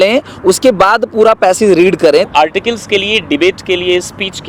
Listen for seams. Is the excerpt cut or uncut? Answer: cut